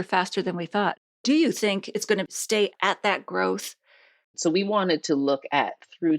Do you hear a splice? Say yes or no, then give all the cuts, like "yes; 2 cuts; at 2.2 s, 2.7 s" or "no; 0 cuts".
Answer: yes; 3 cuts; at 1.0 s, 2.7 s, 4.3 s